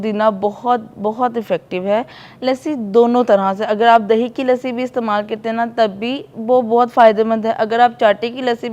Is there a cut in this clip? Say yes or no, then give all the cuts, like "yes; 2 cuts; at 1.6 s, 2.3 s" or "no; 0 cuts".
yes; 1 cut; at 2.2 s